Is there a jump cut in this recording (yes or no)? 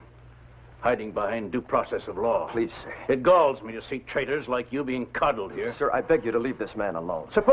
yes